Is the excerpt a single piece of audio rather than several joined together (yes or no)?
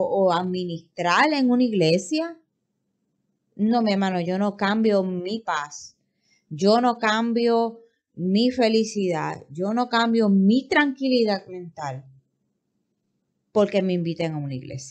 yes